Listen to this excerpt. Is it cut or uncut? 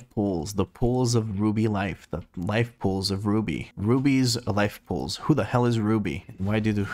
uncut